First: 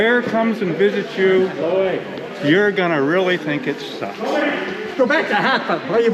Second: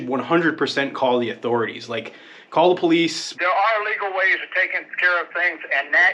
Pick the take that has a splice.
second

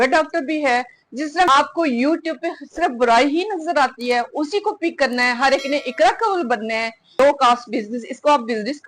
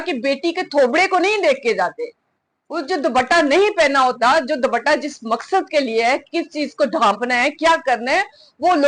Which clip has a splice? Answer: first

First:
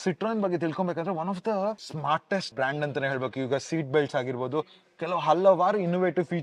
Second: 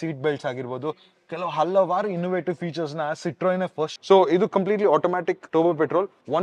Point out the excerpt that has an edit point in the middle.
second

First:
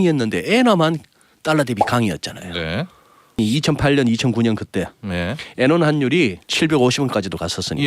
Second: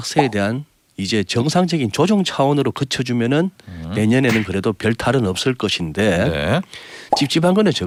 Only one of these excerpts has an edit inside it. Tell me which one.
first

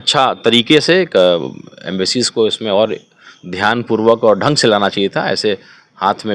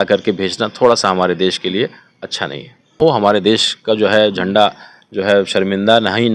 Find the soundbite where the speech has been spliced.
second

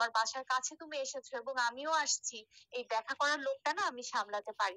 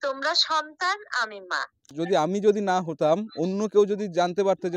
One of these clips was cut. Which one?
second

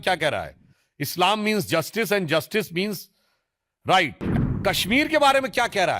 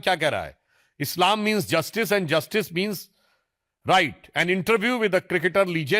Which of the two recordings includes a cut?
first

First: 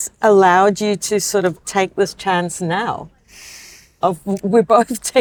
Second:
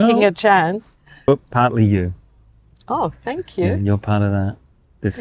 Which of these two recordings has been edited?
second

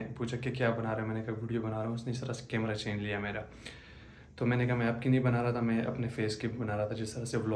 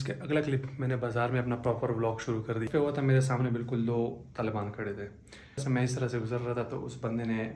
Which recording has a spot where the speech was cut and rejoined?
second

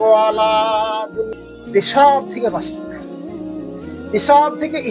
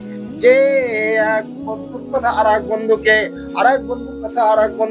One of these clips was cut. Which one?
first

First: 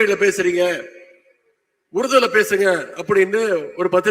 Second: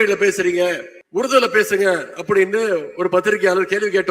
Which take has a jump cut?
second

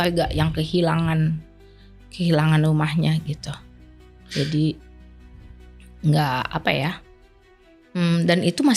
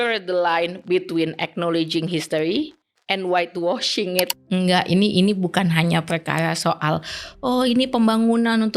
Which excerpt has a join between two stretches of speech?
second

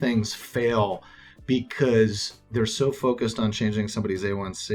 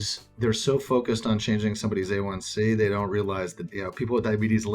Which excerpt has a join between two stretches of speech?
second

